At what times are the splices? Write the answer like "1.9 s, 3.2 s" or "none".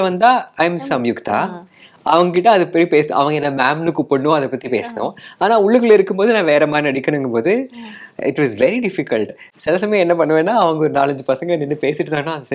none